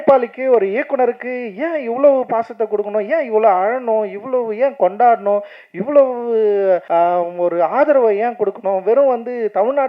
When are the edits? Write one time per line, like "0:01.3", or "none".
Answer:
0:06.8